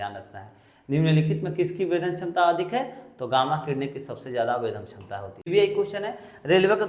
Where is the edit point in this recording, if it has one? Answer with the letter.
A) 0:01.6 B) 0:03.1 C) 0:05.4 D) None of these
C